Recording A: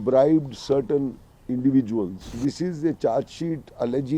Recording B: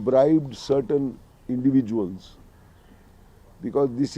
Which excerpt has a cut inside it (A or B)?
A